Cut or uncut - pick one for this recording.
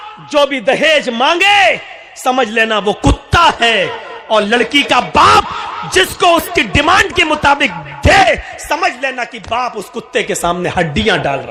uncut